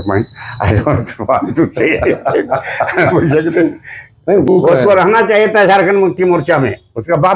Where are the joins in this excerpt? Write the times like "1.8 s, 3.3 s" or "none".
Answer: 4.5 s